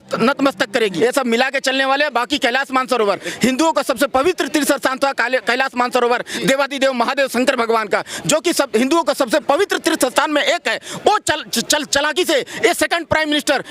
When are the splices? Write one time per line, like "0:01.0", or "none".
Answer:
0:00.9